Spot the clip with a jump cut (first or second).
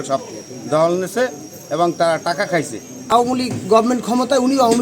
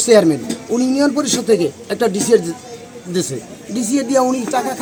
first